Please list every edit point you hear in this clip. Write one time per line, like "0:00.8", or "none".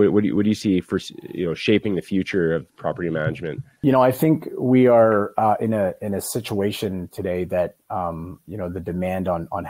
0:04.2